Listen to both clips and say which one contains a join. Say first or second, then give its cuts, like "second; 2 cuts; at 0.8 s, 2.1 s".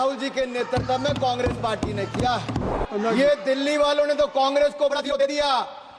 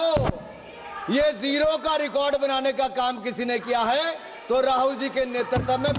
first; 1 cut; at 2.7 s